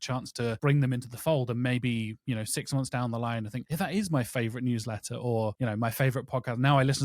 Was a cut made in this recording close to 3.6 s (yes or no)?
yes